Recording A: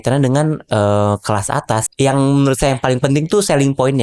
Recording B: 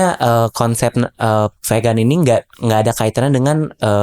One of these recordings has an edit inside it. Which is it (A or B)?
A